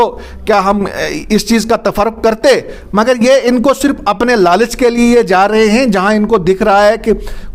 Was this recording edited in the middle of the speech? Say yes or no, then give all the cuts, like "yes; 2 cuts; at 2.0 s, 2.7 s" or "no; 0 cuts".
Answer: no; 0 cuts